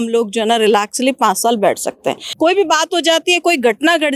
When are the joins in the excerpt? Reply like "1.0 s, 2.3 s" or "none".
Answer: 2.3 s